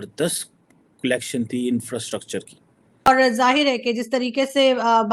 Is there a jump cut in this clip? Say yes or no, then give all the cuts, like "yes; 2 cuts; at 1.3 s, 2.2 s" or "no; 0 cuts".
yes; 1 cut; at 3.1 s